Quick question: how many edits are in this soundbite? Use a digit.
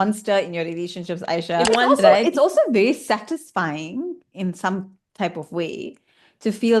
1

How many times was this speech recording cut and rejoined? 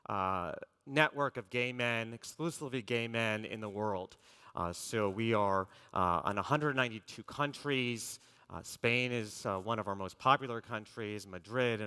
1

